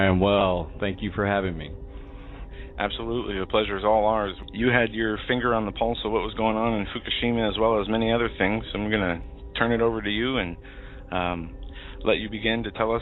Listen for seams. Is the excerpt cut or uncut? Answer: cut